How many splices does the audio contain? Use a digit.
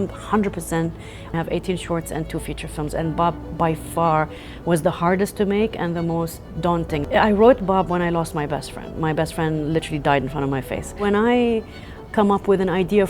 3